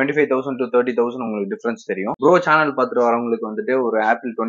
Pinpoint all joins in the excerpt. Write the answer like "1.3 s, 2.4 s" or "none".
2.2 s